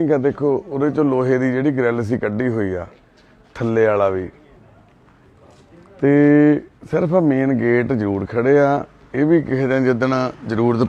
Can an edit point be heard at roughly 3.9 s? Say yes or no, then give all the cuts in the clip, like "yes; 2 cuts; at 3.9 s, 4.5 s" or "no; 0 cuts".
yes; 1 cut; at 3.9 s